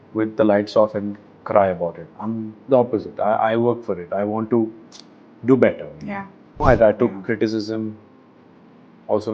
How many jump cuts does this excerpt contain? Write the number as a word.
one